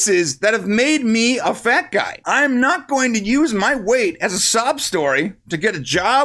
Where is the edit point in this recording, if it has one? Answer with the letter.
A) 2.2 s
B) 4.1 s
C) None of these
A